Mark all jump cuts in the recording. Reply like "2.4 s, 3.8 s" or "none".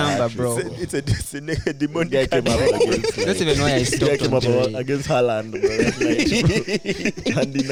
none